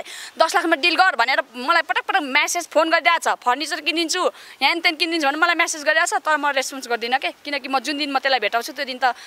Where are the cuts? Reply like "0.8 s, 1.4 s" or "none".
none

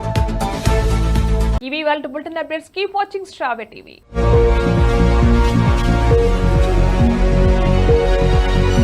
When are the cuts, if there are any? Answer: none

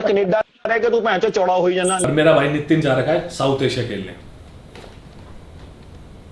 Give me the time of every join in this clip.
2.0 s

